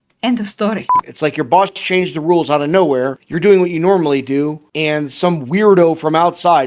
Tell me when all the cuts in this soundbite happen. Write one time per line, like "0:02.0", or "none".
0:01.0
0:03.2
0:04.7